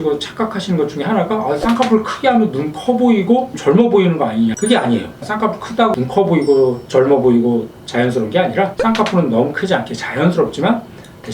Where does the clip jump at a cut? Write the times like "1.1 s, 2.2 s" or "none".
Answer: 4.6 s, 5.2 s